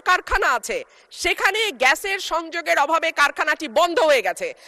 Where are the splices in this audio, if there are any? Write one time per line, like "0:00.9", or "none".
none